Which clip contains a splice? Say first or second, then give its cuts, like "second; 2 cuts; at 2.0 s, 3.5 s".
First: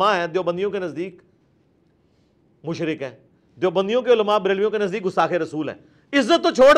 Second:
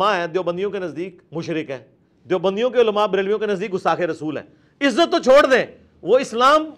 second; 1 cut; at 1.2 s